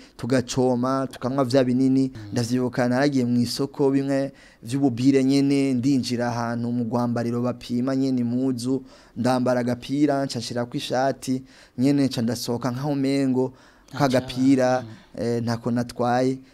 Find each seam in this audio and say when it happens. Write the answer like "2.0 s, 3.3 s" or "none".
2.3 s